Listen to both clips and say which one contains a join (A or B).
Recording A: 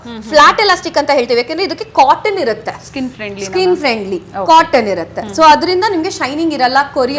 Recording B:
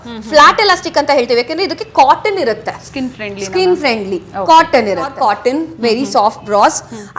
B